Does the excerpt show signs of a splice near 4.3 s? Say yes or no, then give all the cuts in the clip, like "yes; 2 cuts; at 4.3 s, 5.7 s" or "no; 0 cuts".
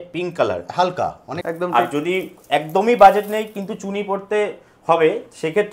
no; 1 cut; at 1.3 s